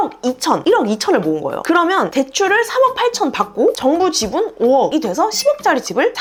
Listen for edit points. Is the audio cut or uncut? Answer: uncut